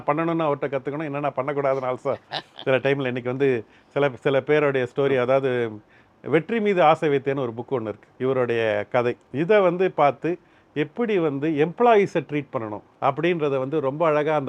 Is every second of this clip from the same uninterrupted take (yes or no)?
no